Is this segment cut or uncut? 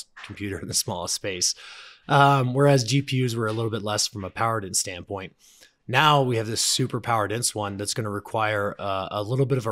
uncut